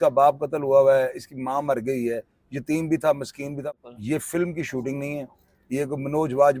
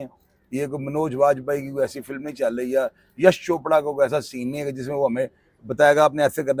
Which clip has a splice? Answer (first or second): first